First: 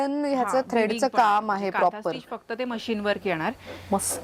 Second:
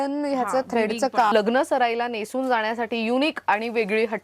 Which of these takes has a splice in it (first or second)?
second